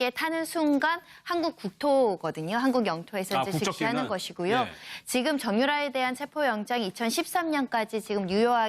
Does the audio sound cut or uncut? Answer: uncut